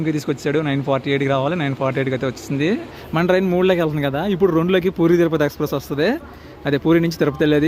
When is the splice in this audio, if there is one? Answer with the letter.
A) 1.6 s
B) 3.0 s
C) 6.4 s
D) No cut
B